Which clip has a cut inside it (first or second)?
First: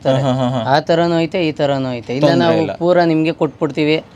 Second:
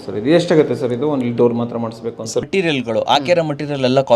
second